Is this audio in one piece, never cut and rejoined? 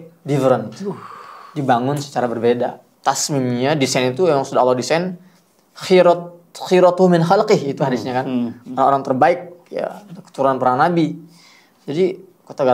no; 1 cut; at 2.9 s

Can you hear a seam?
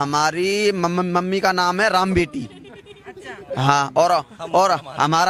no; 0 cuts

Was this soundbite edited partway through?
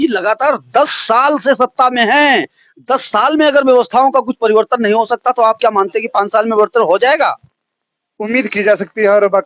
no; 0 cuts

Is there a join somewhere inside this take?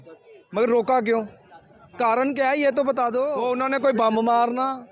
yes; 1 cut; at 3.4 s

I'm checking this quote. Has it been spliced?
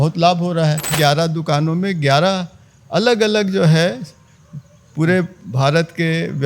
yes; 1 cut; at 0.9 s

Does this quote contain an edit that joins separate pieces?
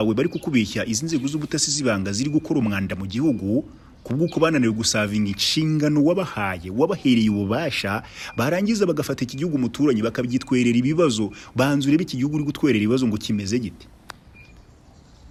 no; 0 cuts

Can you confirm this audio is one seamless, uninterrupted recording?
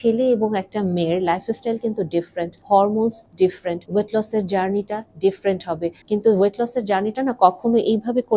no; 3 cuts; at 2.6 s, 3.5 s, 6.0 s

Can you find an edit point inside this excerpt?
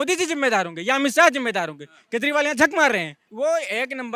no; 0 cuts

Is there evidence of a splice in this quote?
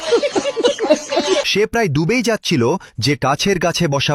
no; 0 cuts

